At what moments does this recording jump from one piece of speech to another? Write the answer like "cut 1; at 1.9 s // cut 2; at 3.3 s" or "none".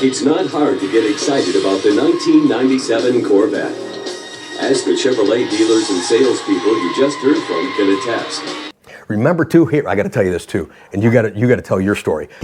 none

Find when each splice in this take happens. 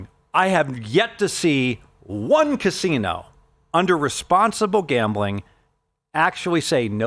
none

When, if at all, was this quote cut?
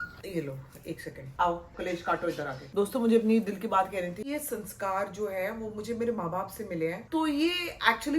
cut 1; at 1.7 s // cut 2; at 2.6 s // cut 3; at 4.3 s

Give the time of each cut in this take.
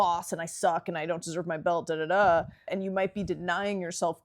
cut 1; at 2.7 s

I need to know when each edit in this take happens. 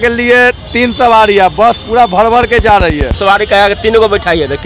cut 1; at 3.1 s

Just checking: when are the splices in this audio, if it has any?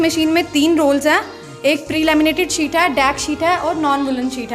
cut 1; at 1.9 s

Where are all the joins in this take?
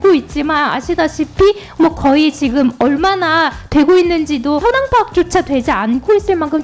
cut 1; at 4.6 s

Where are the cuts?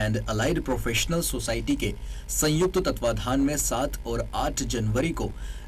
none

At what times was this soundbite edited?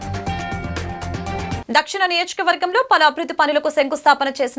cut 1; at 1.6 s

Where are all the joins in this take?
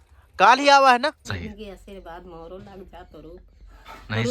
cut 1; at 1.3 s

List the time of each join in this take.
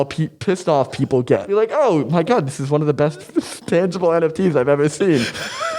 cut 1; at 1.4 s

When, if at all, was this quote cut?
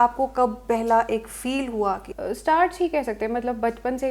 cut 1; at 2.1 s

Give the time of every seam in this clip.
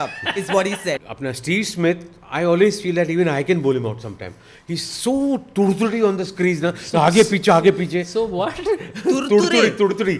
cut 1; at 1.1 s

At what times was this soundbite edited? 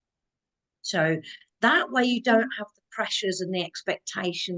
none

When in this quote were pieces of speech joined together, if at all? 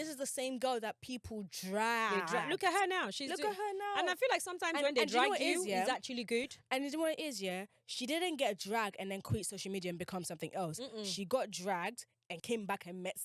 cut 1; at 12.3 s

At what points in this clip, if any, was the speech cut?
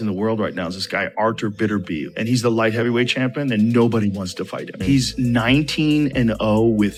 none

